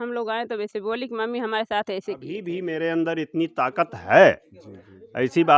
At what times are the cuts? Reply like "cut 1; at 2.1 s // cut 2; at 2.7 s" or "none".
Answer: cut 1; at 2.3 s